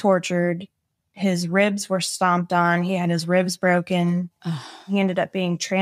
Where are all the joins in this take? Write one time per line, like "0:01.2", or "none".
0:04.9